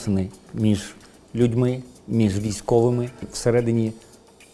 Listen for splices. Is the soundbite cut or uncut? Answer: cut